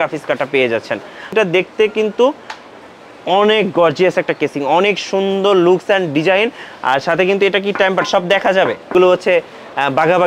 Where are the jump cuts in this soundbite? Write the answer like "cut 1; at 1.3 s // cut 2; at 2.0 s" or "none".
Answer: cut 1; at 1.3 s // cut 2; at 8.9 s

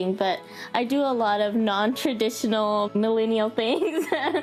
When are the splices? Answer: cut 1; at 2.9 s

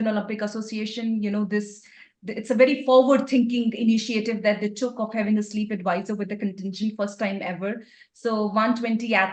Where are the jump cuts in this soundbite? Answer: none

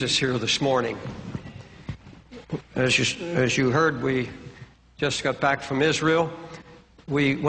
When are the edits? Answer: none

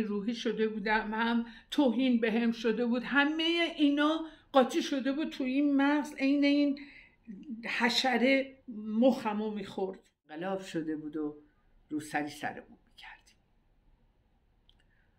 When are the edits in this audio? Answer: cut 1; at 10.3 s

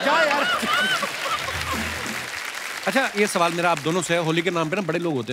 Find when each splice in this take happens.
cut 1; at 2.0 s

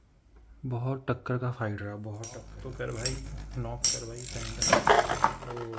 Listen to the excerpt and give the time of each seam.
cut 1; at 2.5 s

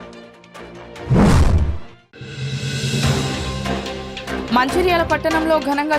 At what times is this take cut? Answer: cut 1; at 4.5 s

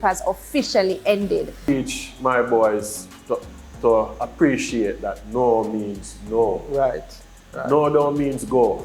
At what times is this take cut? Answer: cut 1; at 1.7 s

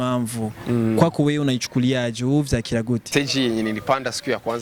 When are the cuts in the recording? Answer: cut 1; at 3.1 s

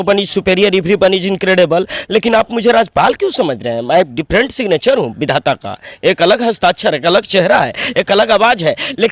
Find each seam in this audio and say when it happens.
none

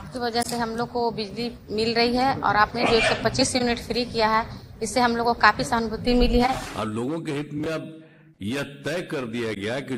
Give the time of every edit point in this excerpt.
cut 1; at 6.6 s

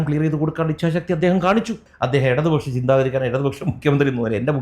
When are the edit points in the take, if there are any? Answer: cut 1; at 1.9 s

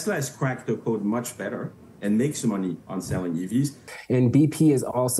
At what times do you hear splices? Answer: cut 1; at 3.9 s

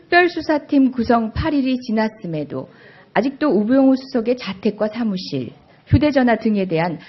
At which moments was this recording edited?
cut 1; at 3.1 s

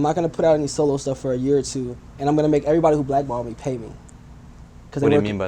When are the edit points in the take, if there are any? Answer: cut 1; at 2.0 s

